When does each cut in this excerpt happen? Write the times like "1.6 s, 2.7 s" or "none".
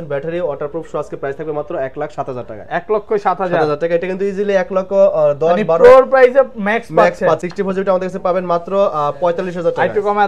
7.4 s